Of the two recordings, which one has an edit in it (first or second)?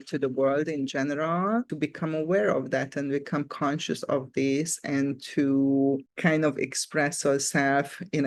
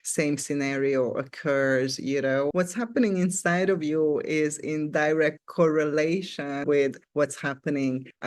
second